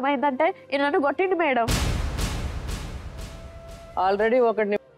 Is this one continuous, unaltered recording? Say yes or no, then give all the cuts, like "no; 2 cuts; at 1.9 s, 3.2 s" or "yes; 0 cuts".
no; 2 cuts; at 1.8 s, 3.8 s